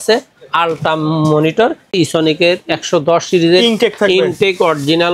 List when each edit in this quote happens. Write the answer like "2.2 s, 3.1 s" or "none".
1.9 s